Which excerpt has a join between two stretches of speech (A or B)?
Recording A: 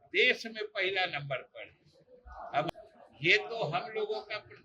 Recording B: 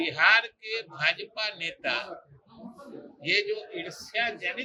A